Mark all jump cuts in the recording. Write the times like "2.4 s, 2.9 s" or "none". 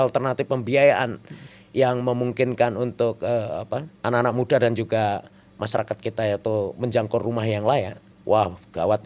3.9 s, 8.0 s